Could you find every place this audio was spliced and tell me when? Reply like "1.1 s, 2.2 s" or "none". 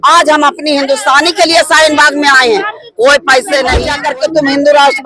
3.9 s